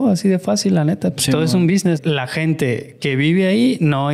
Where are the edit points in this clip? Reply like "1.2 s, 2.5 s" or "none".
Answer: 2.0 s